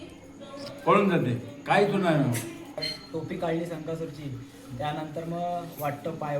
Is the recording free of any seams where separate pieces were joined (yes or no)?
no